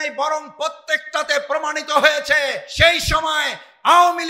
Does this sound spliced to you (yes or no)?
yes